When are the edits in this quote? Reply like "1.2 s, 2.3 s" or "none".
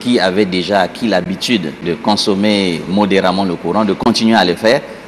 1.5 s